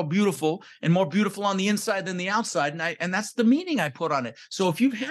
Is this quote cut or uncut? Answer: uncut